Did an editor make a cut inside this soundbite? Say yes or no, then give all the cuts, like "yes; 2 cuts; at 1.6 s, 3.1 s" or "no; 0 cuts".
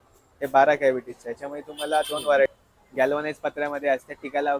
yes; 1 cut; at 2.6 s